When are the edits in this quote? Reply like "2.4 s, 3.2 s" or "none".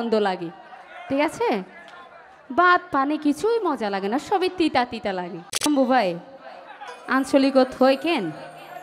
5.7 s